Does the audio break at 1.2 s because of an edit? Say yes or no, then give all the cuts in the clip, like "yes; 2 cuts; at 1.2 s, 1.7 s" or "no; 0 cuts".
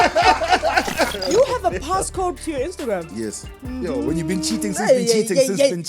yes; 2 cuts; at 1.2 s, 2.4 s